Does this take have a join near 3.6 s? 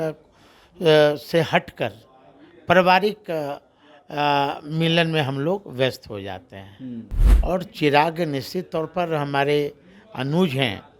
no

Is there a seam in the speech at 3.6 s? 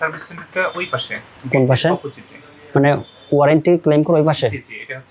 no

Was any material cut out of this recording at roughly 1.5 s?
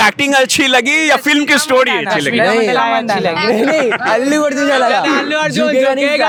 no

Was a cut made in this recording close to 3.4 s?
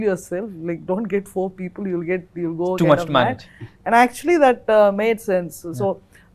no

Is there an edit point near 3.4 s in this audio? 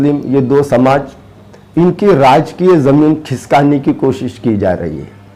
no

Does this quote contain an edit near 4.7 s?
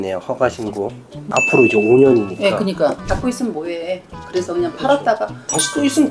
no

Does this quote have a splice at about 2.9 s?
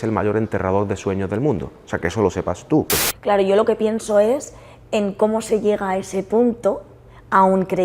yes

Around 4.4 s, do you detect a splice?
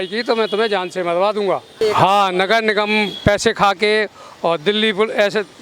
no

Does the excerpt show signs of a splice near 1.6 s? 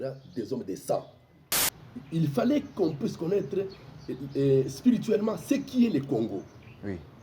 yes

